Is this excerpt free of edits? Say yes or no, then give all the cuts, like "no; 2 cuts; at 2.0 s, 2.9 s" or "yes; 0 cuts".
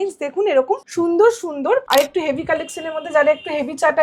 no; 2 cuts; at 0.9 s, 1.9 s